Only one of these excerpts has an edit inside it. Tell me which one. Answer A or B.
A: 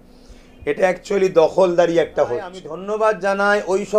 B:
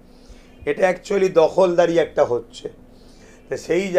A